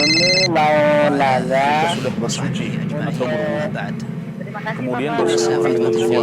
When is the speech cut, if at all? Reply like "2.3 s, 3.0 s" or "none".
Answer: 5.2 s

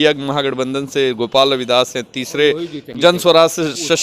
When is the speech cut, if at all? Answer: 2.9 s

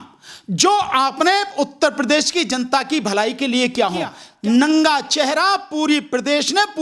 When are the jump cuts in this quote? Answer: 4.2 s

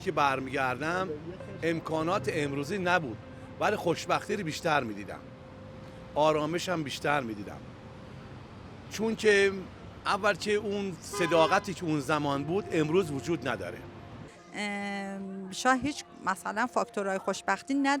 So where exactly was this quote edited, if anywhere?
14.3 s

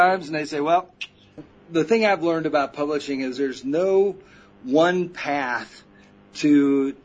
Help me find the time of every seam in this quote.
1.5 s

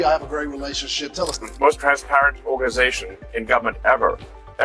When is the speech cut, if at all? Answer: 1.5 s

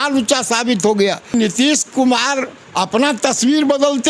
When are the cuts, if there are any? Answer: 1.3 s

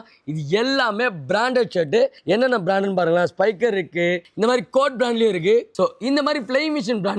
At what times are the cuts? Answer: 2.2 s, 4.3 s, 5.7 s

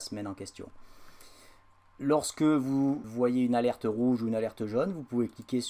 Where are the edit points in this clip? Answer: 3.1 s

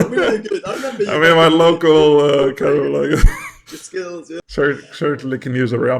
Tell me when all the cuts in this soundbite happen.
4.3 s

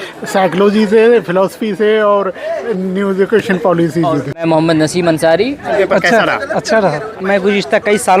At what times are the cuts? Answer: 4.2 s, 5.7 s, 7.2 s

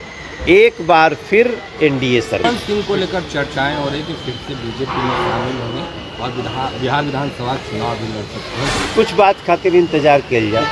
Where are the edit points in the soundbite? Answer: 2.4 s, 8.9 s

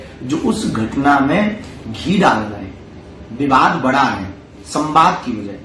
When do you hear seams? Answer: none

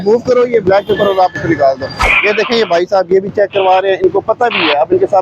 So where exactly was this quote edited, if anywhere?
2.0 s

